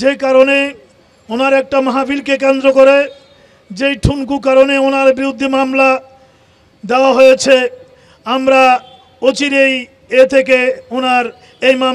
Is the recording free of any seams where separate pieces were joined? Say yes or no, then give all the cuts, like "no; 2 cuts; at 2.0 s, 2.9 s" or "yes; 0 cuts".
yes; 0 cuts